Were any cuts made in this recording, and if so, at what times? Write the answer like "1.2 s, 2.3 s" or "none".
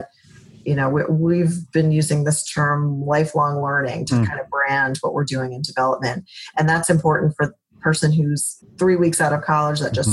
8.6 s